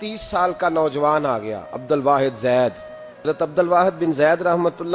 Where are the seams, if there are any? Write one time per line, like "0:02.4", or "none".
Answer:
0:03.2